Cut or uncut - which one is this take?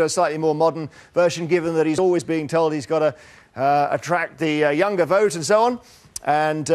uncut